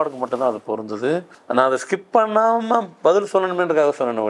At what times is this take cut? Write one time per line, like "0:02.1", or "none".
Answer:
0:01.4